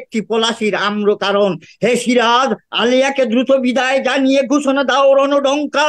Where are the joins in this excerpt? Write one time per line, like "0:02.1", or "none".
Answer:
none